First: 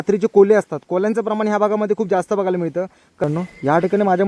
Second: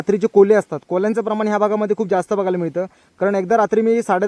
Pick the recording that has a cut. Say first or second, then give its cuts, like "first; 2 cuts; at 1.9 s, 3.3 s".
first; 1 cut; at 3.2 s